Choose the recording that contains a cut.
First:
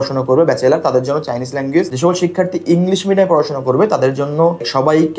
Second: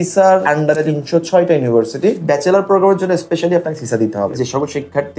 second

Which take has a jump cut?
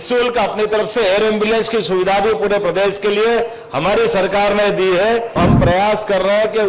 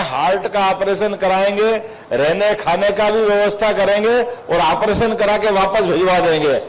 first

